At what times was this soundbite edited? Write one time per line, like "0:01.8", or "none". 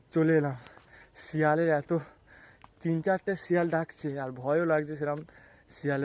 none